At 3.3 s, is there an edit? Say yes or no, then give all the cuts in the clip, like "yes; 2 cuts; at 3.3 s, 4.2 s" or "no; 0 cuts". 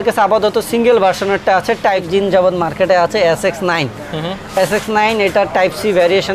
no; 1 cut; at 2.1 s